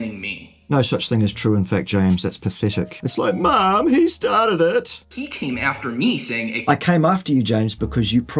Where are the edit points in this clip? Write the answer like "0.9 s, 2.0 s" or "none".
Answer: 3.0 s, 4.9 s